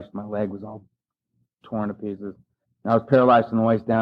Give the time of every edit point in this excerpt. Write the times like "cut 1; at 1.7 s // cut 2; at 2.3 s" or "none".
cut 1; at 2.7 s